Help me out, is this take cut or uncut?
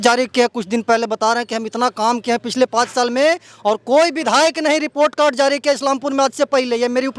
uncut